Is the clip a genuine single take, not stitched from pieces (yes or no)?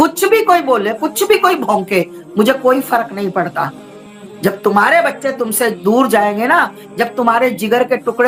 yes